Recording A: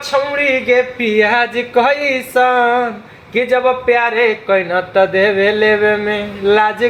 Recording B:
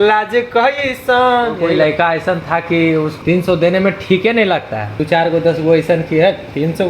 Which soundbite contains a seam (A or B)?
B